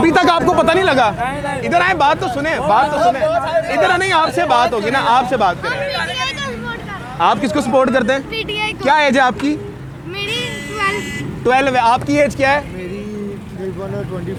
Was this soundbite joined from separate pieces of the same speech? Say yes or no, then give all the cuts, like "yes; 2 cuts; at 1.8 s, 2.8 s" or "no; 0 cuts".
no; 0 cuts